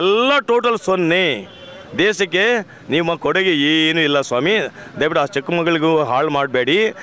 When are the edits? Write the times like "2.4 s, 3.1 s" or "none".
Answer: none